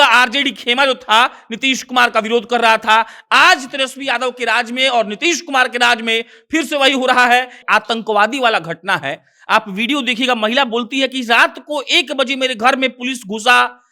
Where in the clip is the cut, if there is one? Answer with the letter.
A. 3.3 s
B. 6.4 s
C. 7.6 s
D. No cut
C